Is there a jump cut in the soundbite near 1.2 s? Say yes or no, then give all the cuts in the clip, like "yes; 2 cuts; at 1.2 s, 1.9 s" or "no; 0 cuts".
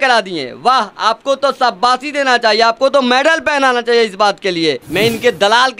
no; 1 cut; at 4.8 s